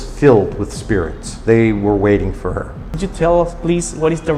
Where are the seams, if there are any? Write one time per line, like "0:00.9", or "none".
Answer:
0:03.0